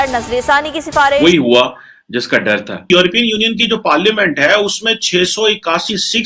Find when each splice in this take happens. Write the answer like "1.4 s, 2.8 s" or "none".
1.2 s, 2.9 s